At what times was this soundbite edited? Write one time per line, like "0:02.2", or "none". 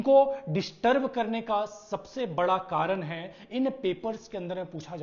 none

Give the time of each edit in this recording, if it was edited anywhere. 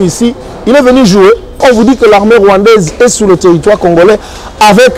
0:01.6

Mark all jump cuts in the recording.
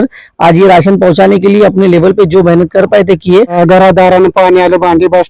0:03.6

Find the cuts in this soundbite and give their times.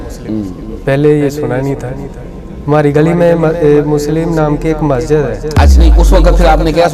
0:05.8

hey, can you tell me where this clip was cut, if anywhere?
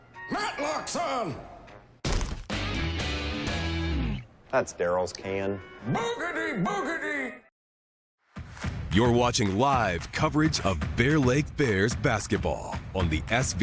none

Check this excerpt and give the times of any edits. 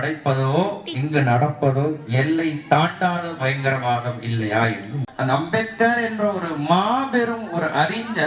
0:05.1

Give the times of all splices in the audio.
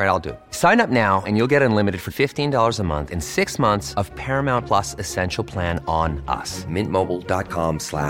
none

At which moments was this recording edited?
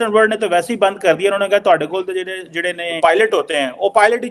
0:02.9

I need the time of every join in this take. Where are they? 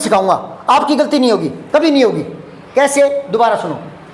none

